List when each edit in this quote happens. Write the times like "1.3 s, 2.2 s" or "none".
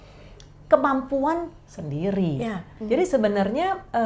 2.7 s